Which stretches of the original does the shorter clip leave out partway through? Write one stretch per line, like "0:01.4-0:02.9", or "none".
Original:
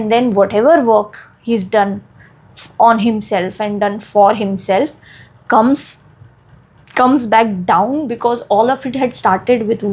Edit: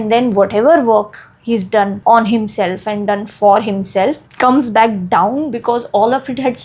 0:02.0-0:02.7
0:05.0-0:06.8